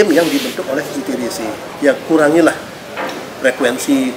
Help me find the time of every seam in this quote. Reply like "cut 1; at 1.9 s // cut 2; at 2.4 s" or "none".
cut 1; at 1.7 s